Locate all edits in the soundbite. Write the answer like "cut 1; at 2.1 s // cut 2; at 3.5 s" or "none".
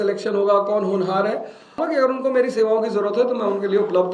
cut 1; at 1.8 s